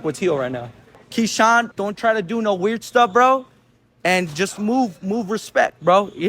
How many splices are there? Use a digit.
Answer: 2